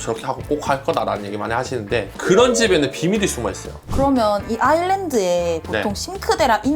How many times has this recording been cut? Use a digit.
1